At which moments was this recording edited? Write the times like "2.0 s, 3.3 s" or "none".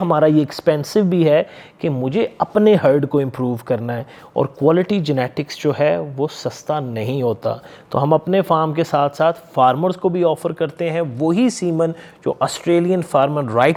none